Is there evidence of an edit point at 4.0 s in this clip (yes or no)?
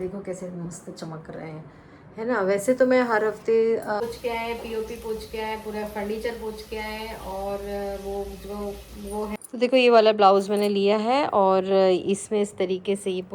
yes